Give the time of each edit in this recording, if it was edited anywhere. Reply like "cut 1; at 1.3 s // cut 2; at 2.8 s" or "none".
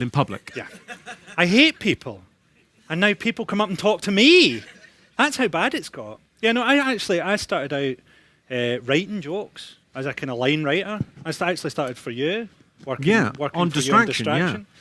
cut 1; at 11.8 s